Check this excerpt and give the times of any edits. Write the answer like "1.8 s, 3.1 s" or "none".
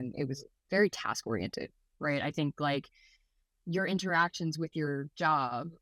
none